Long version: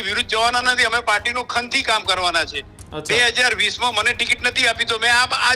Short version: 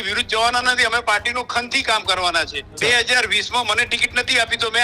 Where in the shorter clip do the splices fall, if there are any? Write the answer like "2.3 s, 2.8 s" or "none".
2.6 s